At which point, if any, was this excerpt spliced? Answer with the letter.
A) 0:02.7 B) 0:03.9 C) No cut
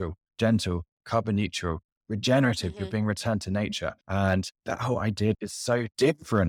B